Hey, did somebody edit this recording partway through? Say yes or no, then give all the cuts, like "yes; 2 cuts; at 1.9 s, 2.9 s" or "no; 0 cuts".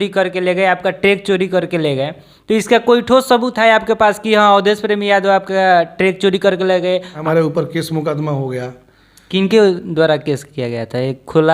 yes; 1 cut; at 7.2 s